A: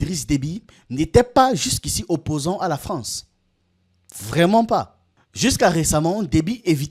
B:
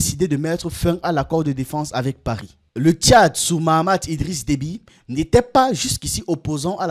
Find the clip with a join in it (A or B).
B